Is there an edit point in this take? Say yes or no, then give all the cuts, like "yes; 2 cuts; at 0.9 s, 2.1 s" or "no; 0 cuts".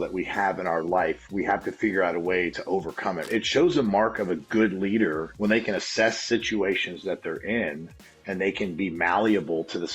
yes; 2 cuts; at 2.9 s, 5.3 s